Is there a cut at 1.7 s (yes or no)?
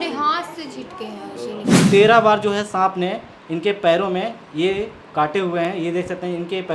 yes